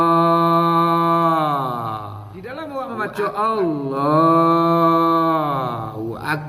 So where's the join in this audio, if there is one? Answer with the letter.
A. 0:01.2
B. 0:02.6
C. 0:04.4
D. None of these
B